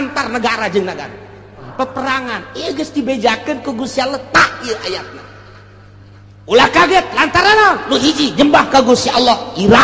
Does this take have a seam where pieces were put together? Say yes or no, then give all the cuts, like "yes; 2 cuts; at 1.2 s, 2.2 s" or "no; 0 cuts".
yes; 1 cut; at 1.7 s